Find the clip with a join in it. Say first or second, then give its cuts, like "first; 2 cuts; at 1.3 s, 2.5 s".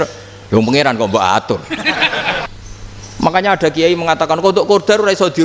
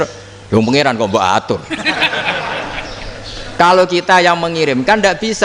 first; 1 cut; at 2.5 s